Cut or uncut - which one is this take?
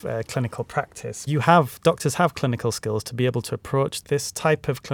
cut